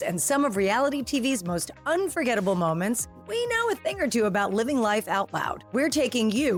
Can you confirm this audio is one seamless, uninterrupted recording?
yes; 0 cuts

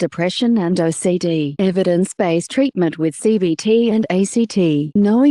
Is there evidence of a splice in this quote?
yes; 1 cut; at 3.6 s

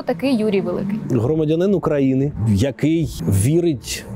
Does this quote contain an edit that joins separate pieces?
yes; 3 cuts; at 1.0 s, 2.4 s, 3.2 s

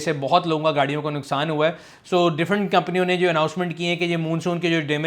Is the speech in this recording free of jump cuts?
yes; 0 cuts

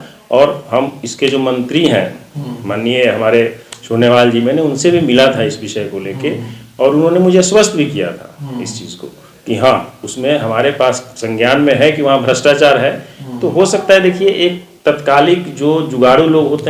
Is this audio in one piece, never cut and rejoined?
yes; 0 cuts

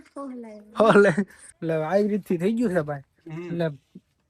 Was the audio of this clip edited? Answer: yes; 1 cut; at 1.4 s

